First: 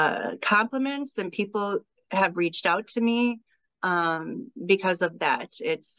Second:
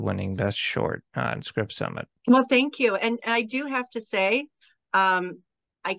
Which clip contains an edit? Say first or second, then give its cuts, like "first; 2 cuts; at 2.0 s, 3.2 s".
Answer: second; 1 cut; at 2.1 s